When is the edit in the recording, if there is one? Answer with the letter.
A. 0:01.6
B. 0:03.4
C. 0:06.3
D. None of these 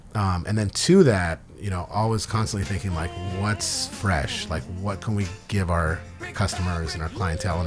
D